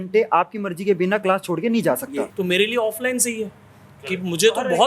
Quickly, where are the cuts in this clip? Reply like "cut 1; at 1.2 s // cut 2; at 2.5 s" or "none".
cut 1; at 2.3 s